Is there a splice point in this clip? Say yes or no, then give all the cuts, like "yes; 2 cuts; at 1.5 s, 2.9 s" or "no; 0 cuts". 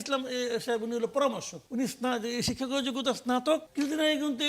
yes; 2 cuts; at 1.5 s, 3.7 s